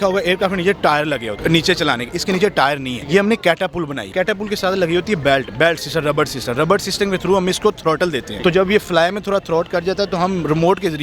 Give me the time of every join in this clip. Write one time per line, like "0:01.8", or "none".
0:01.3
0:02.9
0:04.1
0:08.3